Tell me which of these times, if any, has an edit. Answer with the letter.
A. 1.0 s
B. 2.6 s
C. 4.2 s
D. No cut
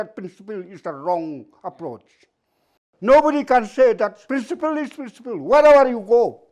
C